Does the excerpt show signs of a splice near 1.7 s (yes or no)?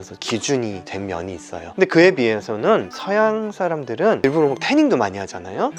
yes